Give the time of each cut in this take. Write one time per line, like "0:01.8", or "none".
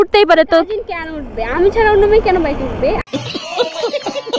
none